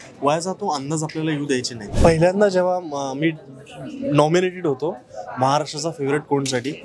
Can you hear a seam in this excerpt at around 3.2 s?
no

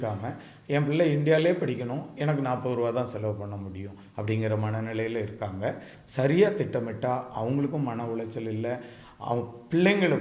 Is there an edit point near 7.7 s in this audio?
no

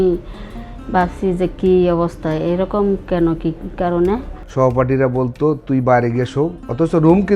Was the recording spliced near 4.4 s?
yes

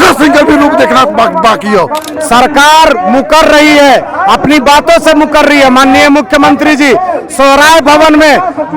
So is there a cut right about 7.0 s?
no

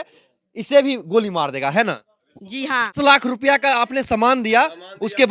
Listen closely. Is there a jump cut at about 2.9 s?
yes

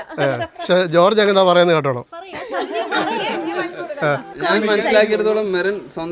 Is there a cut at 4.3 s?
yes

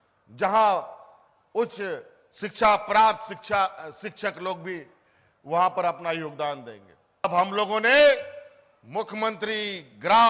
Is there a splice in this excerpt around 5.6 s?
no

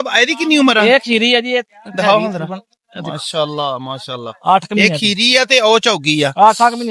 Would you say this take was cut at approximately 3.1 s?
no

